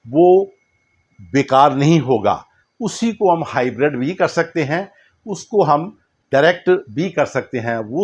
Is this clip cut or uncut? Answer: uncut